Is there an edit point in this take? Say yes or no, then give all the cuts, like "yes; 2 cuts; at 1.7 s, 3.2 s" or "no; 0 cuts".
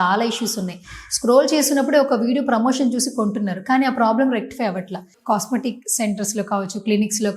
yes; 1 cut; at 5.1 s